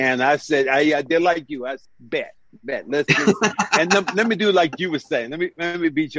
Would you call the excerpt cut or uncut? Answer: cut